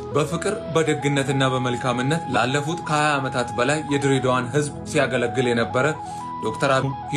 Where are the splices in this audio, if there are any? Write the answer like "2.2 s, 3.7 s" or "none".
none